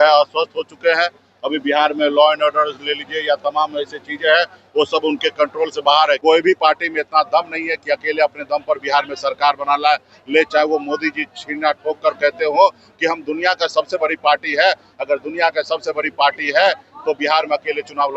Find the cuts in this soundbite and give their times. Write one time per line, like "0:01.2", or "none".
0:06.2